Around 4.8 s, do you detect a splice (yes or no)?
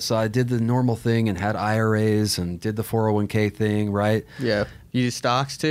yes